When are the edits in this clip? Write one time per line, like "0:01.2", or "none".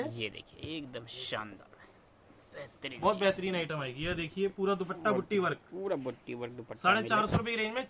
none